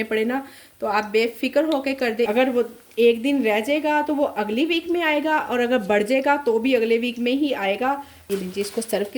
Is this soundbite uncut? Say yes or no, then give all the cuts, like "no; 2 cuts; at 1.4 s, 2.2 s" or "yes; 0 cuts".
no; 2 cuts; at 2.3 s, 8.2 s